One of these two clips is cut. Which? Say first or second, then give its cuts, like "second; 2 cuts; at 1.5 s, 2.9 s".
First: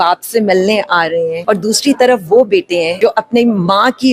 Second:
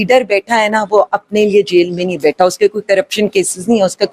first; 2 cuts; at 1.4 s, 2.9 s